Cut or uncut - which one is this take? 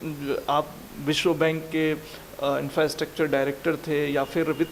uncut